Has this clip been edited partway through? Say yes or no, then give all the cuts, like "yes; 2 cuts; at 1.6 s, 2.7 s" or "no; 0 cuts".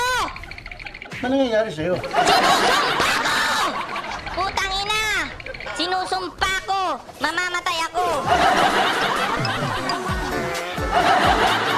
yes; 1 cut; at 10.9 s